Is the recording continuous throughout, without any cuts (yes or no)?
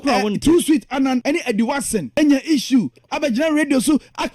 no